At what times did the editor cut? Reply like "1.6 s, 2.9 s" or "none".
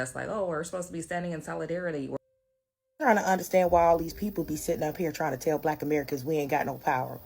2.2 s